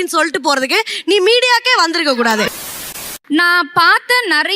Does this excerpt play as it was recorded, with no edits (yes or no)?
no